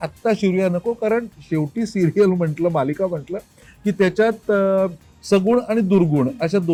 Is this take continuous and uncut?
yes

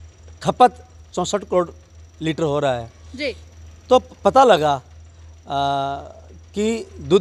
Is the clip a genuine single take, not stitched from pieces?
yes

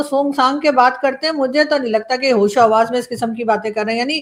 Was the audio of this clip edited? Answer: no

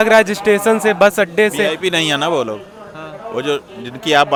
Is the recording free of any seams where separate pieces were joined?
yes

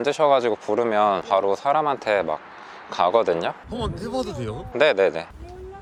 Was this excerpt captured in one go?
yes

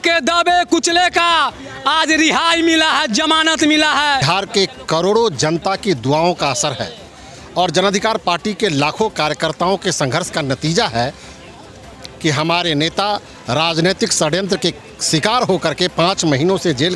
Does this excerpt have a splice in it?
yes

